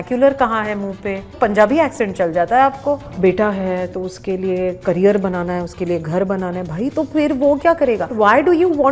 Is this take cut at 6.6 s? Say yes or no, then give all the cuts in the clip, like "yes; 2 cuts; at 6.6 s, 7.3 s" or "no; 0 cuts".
no; 3 cuts; at 1.3 s, 3.1 s, 8.1 s